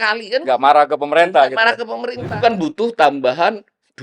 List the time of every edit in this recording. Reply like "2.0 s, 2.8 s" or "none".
2.3 s